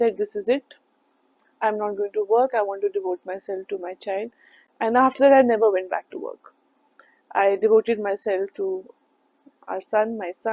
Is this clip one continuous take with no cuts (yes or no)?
yes